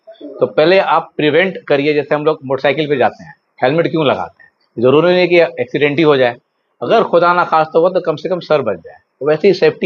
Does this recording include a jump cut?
no; 0 cuts

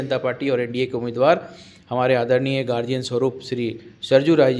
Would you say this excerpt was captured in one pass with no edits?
yes; 0 cuts

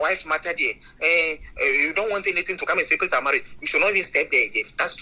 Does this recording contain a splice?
no; 0 cuts

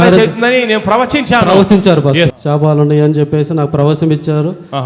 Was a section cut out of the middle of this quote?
yes; 1 cut; at 2.3 s

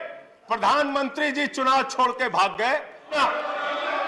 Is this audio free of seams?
no; 1 cut; at 3.2 s

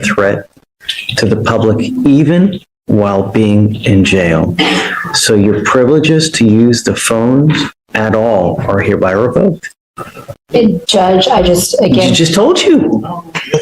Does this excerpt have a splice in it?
no; 0 cuts

